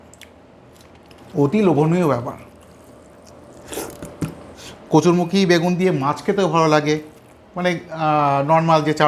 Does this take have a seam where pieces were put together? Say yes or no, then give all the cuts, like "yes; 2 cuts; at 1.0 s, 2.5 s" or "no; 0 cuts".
yes; 1 cut; at 4.6 s